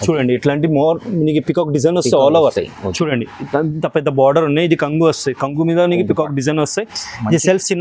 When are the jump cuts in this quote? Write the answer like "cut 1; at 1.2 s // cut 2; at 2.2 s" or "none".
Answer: none